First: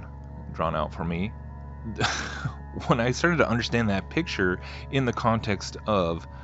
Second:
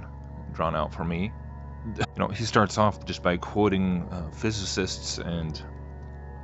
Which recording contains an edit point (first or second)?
first